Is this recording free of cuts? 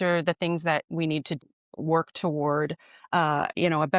no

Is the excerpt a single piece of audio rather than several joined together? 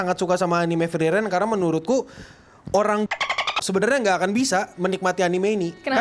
yes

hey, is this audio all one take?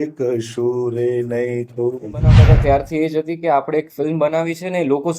no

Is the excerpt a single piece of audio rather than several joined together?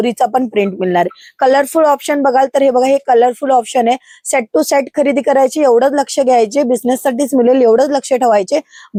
yes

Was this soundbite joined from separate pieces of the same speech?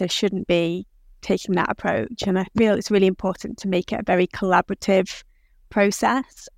no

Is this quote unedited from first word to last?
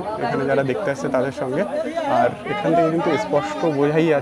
yes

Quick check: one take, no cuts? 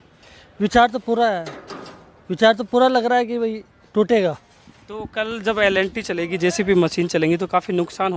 yes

